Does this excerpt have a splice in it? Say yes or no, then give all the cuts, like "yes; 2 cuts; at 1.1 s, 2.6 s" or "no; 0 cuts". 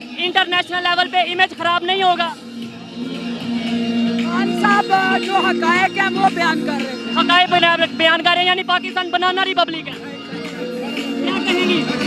no; 0 cuts